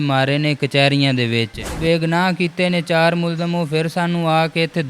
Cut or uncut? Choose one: cut